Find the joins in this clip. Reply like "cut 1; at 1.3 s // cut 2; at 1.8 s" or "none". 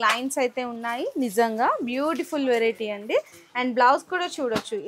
none